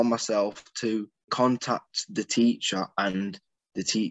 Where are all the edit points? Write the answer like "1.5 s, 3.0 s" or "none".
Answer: 1.3 s